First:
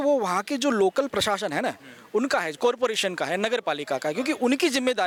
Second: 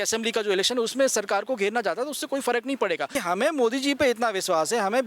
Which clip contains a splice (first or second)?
second